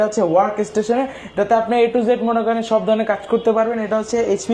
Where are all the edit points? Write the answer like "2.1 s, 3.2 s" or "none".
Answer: none